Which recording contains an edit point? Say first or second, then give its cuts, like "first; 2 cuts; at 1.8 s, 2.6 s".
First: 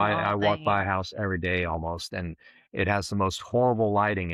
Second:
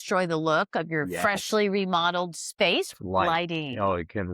second; 1 cut; at 2.9 s